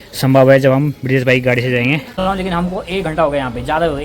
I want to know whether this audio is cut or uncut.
cut